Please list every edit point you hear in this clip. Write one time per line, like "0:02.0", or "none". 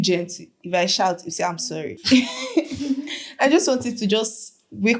0:02.0